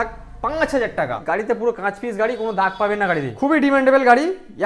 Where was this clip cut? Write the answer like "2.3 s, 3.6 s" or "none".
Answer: 1.2 s, 3.3 s

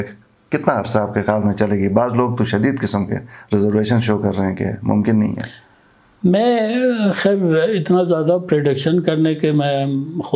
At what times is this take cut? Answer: none

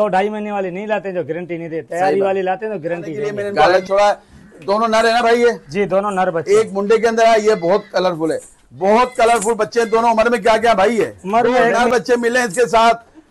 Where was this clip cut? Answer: 3.7 s, 11.7 s

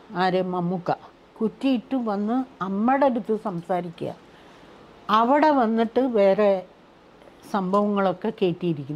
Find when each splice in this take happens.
none

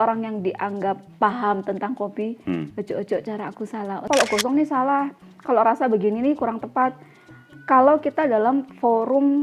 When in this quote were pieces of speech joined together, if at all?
4.1 s

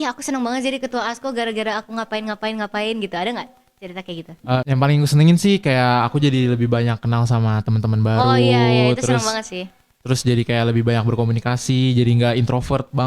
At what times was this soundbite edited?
4.7 s

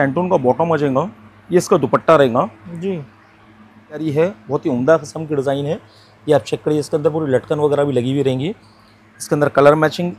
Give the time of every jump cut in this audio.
4.0 s

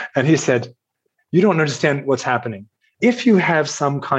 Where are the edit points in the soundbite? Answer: 2.9 s

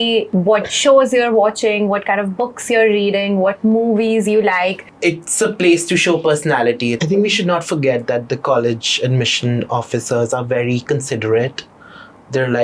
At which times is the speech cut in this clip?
4.8 s, 7.0 s

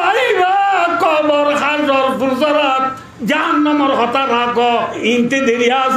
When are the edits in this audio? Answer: 4.9 s

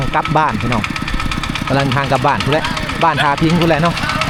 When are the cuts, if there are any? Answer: none

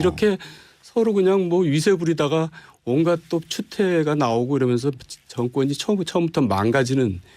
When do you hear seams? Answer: 4.4 s

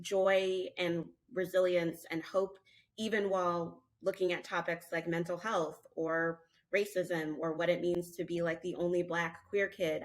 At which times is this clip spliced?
none

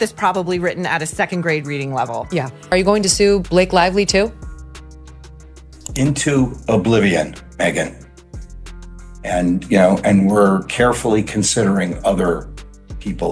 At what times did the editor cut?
2.5 s

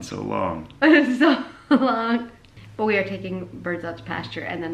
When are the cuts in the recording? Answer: 2.4 s

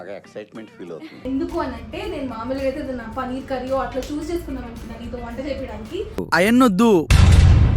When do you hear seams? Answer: none

